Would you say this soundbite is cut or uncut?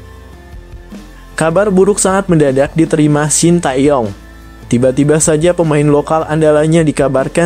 cut